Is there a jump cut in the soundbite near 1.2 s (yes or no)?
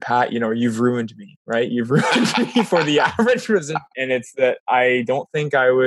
no